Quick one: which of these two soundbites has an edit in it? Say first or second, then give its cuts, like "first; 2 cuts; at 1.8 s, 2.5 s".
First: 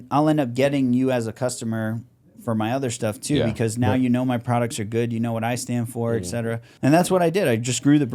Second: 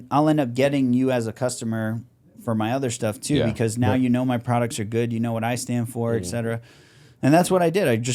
first; 1 cut; at 6.7 s